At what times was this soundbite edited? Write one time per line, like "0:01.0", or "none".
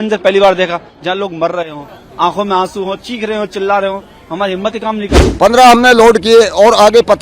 0:05.3

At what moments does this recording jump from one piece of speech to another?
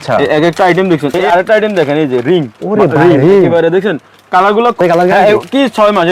0:01.1
0:04.8

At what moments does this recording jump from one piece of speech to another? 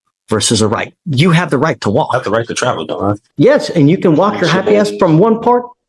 0:03.2

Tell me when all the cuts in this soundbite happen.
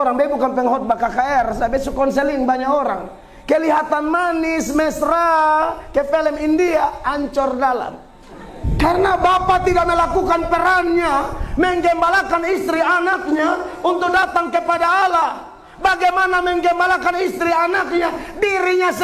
0:08.6

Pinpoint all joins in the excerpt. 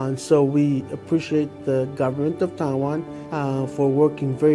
0:03.2

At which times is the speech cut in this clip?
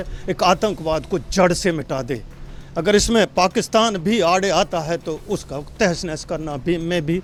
none

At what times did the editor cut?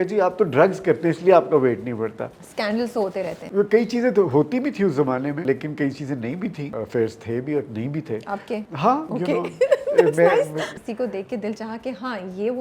0:02.8
0:05.4
0:06.7
0:09.0
0:10.7

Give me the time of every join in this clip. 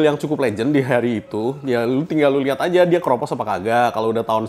none

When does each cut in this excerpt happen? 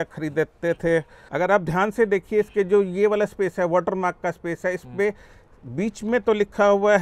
0:01.2

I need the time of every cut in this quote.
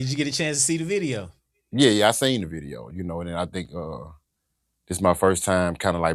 none

